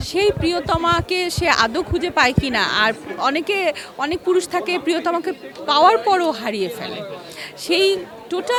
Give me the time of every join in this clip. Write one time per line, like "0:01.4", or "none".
none